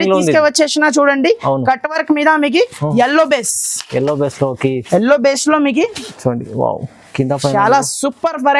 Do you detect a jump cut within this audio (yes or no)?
no